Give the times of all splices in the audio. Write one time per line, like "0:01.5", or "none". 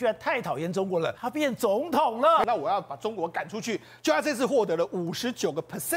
0:01.2
0:02.4

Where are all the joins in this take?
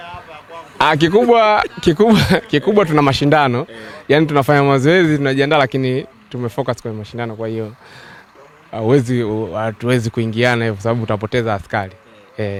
none

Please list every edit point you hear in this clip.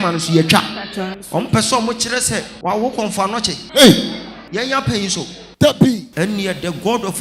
0:01.2
0:02.5
0:03.6
0:04.3
0:06.1

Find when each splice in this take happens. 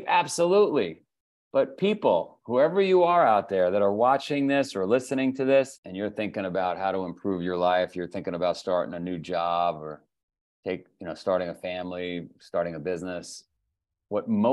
0:05.8

